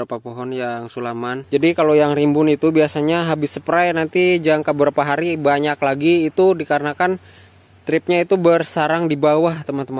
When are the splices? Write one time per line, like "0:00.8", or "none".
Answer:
0:01.3